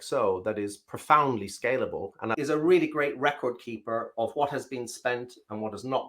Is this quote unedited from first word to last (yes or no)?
no